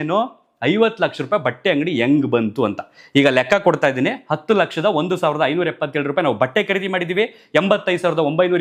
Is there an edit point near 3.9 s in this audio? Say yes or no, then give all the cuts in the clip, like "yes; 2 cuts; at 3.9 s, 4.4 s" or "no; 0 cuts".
no; 0 cuts